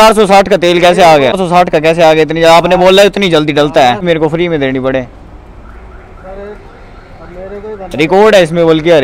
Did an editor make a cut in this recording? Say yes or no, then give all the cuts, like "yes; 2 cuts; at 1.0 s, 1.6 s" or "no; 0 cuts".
yes; 2 cuts; at 1.4 s, 4.0 s